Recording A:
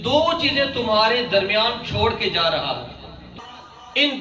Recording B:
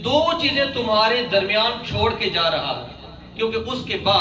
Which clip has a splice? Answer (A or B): A